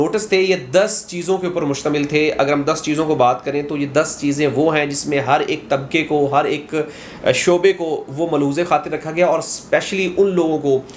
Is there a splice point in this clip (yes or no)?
no